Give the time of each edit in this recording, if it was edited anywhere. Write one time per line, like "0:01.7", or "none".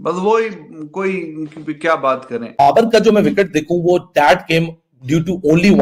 0:02.6